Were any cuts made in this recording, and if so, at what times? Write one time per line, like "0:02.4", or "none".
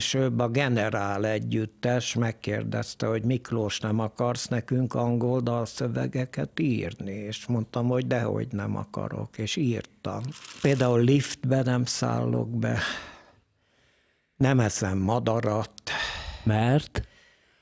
0:10.6